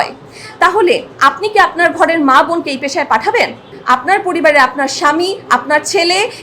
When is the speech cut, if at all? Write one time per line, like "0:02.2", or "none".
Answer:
0:03.7